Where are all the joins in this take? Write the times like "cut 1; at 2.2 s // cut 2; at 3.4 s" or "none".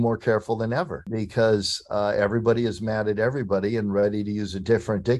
cut 1; at 1.0 s